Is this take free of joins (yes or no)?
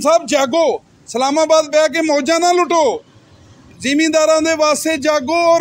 yes